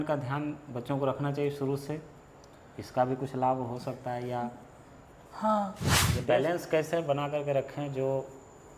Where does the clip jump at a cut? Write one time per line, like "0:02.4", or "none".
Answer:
0:06.1

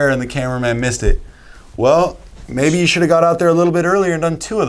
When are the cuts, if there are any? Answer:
none

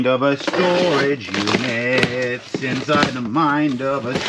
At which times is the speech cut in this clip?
none

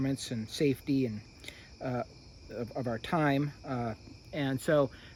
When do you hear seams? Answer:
none

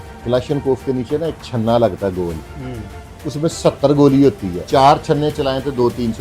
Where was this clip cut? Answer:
0:04.5

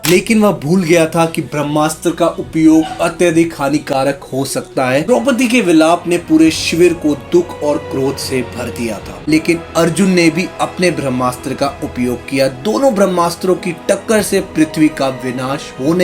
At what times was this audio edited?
0:05.1
0:09.1

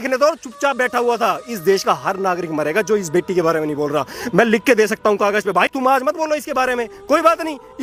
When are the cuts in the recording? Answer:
none

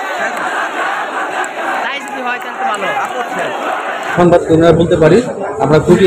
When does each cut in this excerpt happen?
0:04.1

